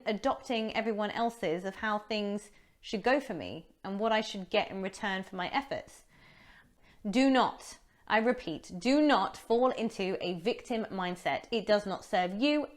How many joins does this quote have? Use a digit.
1